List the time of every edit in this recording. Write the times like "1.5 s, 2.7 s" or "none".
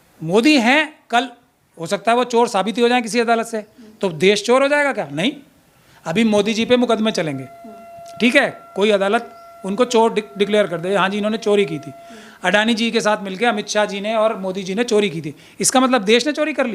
none